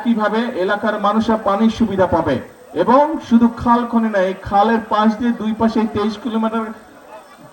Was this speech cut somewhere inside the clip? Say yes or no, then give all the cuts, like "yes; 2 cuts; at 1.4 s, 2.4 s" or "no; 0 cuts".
no; 0 cuts